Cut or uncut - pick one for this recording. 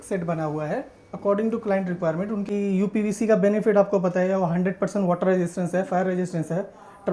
cut